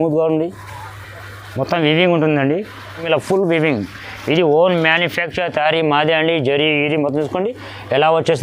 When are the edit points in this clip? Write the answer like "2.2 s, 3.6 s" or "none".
3.0 s

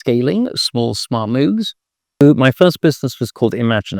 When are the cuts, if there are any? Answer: 2.2 s

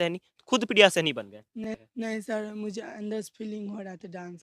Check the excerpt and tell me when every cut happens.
1.6 s

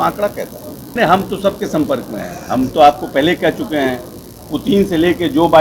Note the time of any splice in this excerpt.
0.9 s

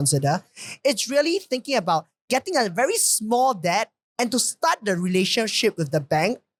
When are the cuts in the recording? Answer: none

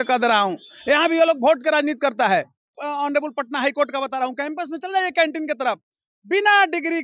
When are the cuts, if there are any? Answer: 2.8 s

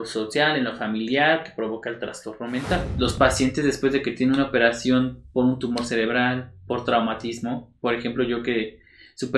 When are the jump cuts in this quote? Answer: 2.9 s

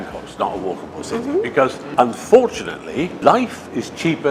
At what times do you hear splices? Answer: 1.8 s, 3.2 s

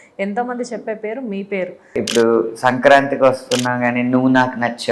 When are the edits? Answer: 2.0 s

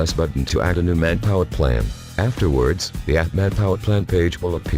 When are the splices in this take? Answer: 1.5 s, 4.0 s

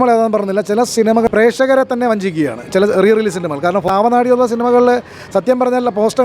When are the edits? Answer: 1.1 s, 3.9 s

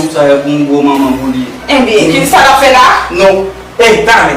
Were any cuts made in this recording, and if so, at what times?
none

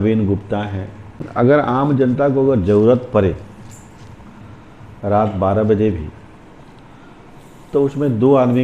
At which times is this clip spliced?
1.2 s

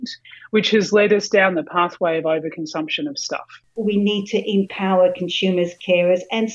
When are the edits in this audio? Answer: 3.6 s

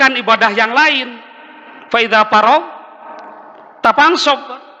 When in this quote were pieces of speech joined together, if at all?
none

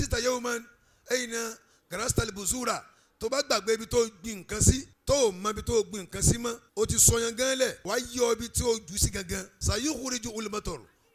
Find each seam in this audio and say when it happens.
4.9 s, 6.6 s, 7.8 s, 9.5 s

